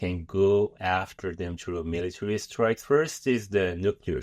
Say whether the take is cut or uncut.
cut